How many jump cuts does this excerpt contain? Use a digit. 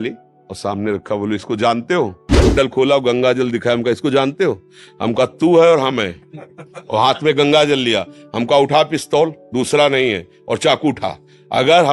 1